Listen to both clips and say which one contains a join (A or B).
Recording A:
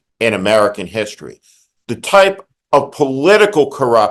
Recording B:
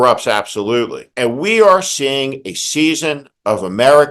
B